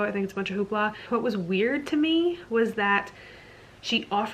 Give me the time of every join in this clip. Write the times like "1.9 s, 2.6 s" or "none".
1.0 s